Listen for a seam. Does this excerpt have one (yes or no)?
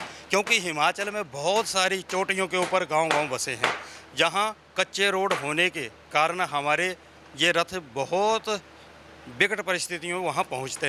no